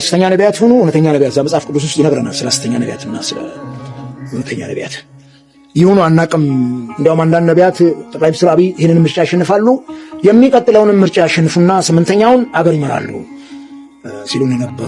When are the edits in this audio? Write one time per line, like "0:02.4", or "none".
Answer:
none

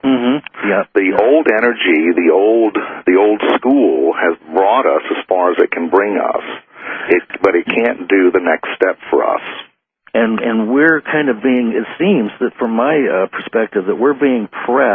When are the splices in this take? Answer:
none

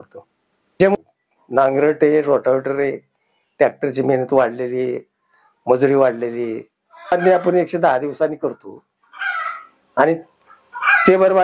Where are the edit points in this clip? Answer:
0:00.9
0:07.1

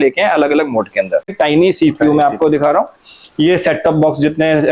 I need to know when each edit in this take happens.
0:01.3

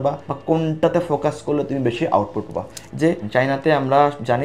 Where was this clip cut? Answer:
0:02.9

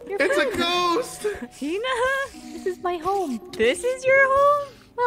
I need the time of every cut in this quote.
0:01.5

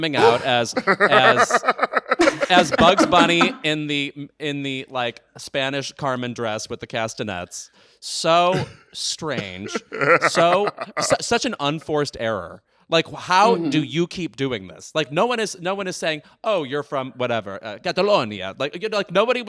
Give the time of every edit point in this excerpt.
none

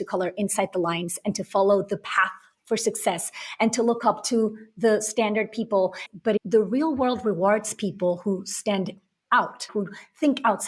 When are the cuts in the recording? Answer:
0:06.1
0:09.7

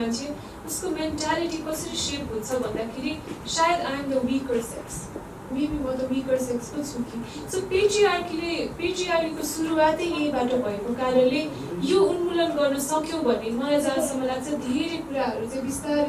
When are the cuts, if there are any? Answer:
none

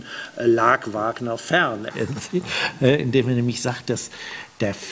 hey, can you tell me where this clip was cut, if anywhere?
0:01.9

